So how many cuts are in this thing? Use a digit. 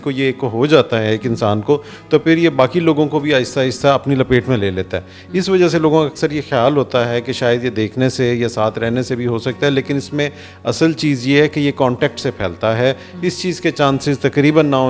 0